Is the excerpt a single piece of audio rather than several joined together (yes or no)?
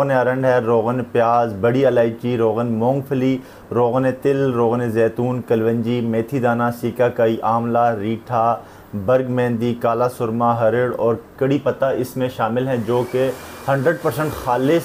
yes